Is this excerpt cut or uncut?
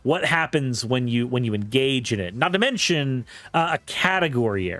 uncut